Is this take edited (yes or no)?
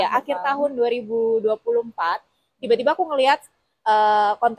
no